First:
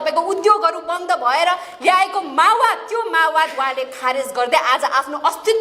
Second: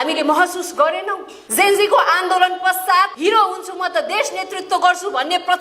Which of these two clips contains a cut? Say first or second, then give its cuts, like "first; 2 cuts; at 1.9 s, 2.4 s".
second; 1 cut; at 3.1 s